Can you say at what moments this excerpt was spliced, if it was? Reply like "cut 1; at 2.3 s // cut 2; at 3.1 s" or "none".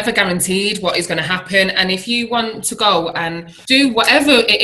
cut 1; at 3.5 s